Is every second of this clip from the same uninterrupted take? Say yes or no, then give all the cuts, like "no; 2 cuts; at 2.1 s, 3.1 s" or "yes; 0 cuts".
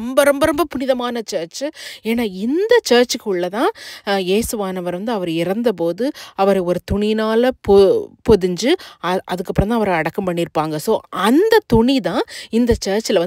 yes; 0 cuts